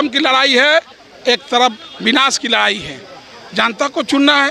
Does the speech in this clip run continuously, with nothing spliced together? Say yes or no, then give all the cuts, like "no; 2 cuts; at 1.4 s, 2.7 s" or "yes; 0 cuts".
yes; 0 cuts